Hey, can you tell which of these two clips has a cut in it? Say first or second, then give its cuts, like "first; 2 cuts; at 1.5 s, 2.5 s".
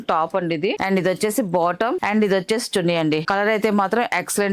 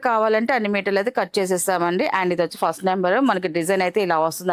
first; 3 cuts; at 0.8 s, 2.0 s, 3.2 s